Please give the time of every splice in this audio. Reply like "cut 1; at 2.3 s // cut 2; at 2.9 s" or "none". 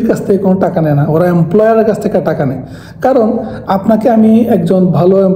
none